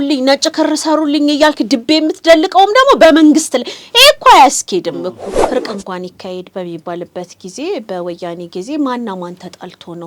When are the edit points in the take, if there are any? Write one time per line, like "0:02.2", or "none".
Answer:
0:05.3

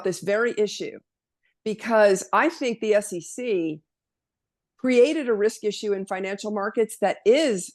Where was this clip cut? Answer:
none

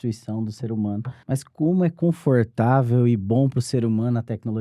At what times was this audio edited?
0:01.1

